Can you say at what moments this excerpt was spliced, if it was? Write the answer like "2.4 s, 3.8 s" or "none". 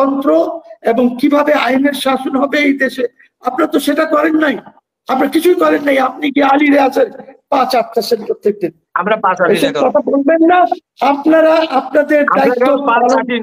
none